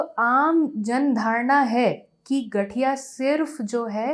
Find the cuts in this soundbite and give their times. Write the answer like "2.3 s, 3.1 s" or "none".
none